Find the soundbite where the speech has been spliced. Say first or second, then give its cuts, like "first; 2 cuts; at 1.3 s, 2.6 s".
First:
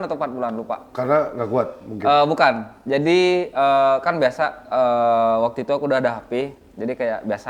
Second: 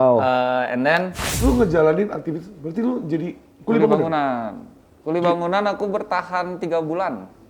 second; 1 cut; at 1.3 s